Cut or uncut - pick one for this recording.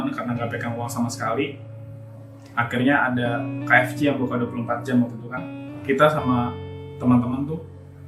cut